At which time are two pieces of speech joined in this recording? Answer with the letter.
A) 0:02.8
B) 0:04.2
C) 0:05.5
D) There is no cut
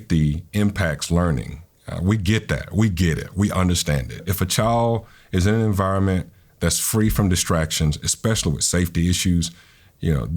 B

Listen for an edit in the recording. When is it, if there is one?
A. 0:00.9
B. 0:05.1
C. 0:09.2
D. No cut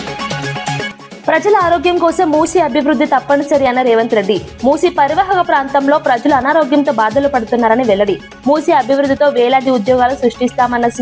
A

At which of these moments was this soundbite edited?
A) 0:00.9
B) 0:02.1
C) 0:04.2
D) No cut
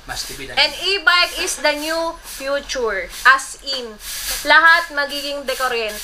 C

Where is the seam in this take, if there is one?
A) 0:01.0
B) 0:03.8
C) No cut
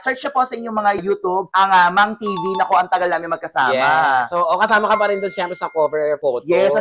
A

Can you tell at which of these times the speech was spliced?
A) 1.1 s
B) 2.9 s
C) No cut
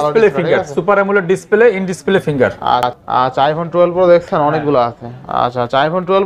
B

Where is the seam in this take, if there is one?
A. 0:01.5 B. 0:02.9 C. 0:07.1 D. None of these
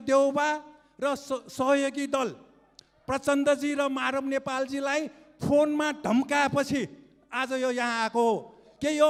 D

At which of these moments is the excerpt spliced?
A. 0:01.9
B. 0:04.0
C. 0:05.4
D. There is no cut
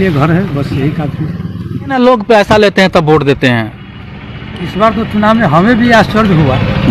A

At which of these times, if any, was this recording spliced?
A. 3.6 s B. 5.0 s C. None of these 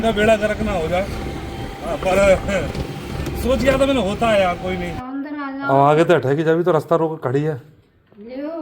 B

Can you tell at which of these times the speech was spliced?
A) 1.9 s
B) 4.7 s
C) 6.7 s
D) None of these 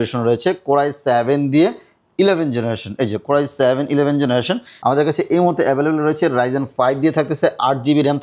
B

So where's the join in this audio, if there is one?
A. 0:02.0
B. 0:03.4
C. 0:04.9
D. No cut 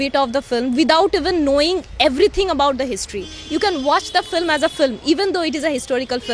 D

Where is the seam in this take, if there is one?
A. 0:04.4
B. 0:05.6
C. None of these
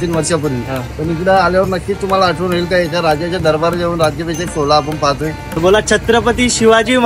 B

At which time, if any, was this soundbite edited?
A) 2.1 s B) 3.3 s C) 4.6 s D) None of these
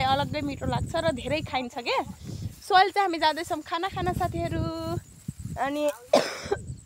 D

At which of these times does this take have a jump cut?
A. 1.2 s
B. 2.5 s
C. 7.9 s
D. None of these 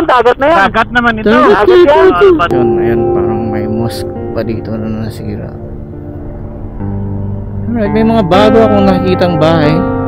B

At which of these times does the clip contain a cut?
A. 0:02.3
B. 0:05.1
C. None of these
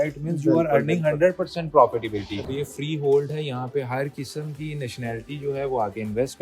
A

